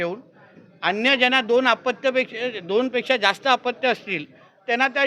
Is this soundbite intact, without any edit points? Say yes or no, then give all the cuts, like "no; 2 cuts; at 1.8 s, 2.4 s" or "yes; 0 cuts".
yes; 0 cuts